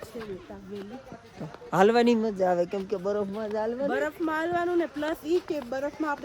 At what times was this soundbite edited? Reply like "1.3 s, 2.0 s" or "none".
none